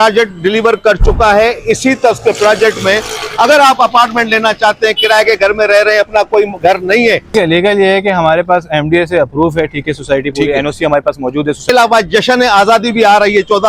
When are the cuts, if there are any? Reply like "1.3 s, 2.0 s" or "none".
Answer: 7.3 s, 11.7 s